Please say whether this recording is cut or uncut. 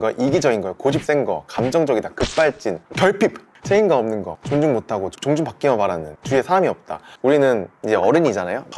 cut